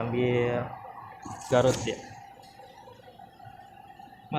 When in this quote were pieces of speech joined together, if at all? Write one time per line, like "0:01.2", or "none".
none